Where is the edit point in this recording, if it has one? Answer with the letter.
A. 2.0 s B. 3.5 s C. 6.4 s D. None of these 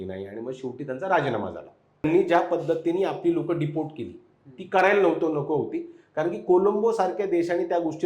A